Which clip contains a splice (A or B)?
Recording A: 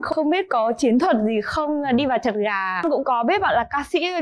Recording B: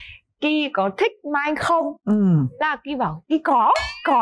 A